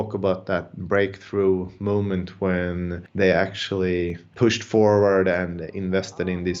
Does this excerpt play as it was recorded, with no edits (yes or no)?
no